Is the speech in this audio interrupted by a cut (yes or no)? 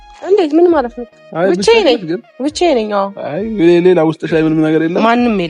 no